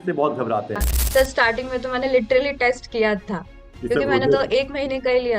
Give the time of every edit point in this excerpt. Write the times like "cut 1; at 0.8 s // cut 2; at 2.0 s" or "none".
cut 1; at 0.9 s